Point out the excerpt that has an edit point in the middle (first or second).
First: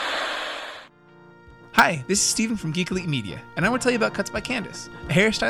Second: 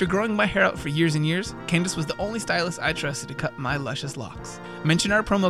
first